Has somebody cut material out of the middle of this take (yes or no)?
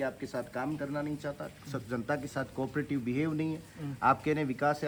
no